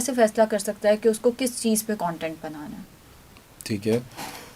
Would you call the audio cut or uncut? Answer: uncut